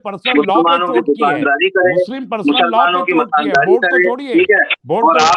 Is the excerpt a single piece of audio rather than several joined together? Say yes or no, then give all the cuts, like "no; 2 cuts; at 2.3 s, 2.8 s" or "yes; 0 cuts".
yes; 0 cuts